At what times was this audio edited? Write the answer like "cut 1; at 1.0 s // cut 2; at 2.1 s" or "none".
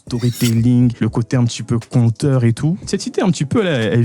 cut 1; at 0.9 s // cut 2; at 2.8 s